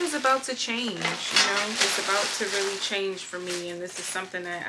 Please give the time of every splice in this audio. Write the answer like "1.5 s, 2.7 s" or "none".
none